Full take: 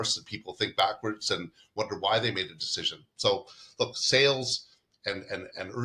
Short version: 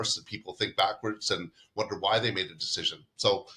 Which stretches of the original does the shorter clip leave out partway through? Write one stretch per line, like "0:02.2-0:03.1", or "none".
none